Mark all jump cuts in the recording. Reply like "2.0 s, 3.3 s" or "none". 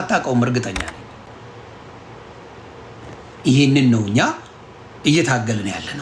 1.3 s